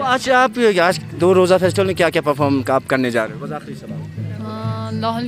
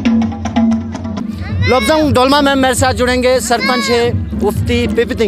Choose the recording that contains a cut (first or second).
second